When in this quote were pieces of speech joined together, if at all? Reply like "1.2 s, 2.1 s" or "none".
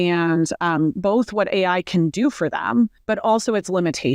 3.0 s